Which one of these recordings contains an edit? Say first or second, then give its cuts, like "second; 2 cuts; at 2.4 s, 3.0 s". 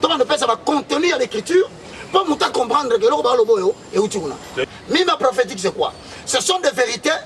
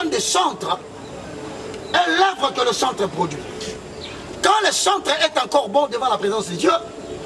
first; 1 cut; at 4.5 s